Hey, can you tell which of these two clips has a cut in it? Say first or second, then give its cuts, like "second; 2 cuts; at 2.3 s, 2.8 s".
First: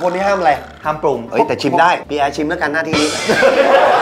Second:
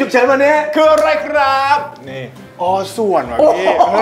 first; 1 cut; at 1.2 s